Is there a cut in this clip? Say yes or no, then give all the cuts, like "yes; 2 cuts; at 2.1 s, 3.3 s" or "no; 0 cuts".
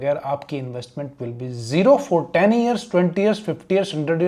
no; 0 cuts